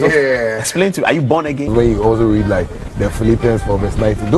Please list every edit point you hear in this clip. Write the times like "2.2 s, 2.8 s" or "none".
1.7 s